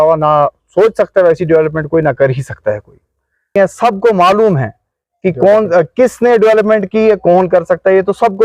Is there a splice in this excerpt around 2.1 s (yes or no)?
no